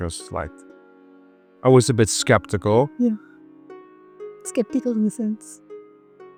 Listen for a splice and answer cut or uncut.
uncut